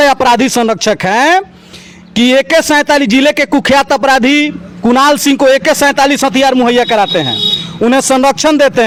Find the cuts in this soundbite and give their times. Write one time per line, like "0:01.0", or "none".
none

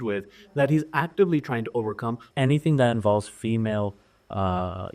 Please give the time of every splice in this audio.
0:02.2

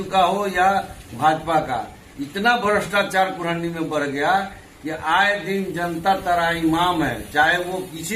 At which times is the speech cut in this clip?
none

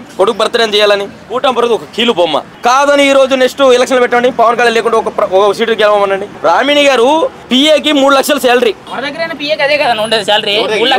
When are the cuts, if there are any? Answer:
0:01.2
0:02.5
0:06.3
0:07.4
0:08.9

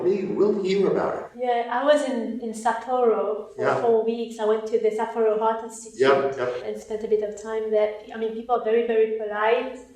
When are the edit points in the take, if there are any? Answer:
0:01.3

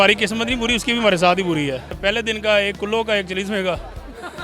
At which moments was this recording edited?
0:02.0

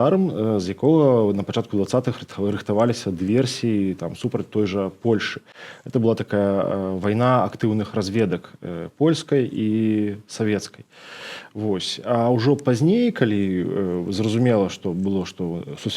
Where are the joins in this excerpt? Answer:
none

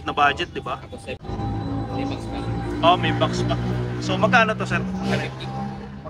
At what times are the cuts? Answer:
0:01.2

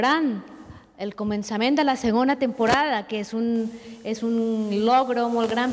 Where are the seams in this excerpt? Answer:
0:02.5

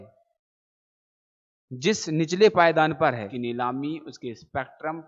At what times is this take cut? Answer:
0:03.3

